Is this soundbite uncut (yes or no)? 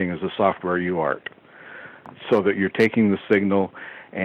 no